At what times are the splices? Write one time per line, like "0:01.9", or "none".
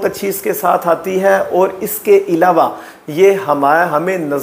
none